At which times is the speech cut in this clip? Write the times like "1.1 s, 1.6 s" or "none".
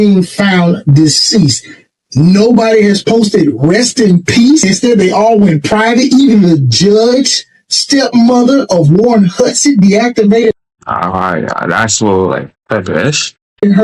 4.6 s